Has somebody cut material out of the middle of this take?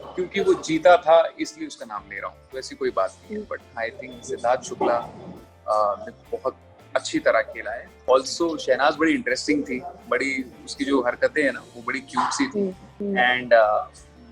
yes; 2 cuts; at 7.9 s, 12.9 s

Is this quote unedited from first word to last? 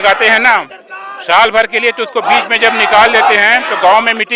yes; 0 cuts

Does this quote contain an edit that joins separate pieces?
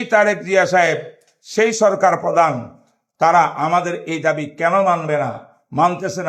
no; 0 cuts

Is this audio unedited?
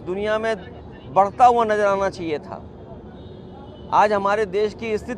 yes; 0 cuts

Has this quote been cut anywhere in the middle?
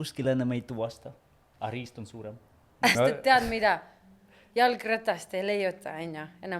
yes; 1 cut; at 2.9 s

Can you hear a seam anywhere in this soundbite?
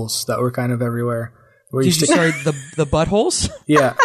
no; 0 cuts

